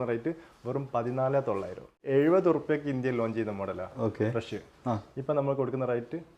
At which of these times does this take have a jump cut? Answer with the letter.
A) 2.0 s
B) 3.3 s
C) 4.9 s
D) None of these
A